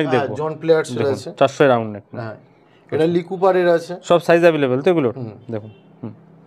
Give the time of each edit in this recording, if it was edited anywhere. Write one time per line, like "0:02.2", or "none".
none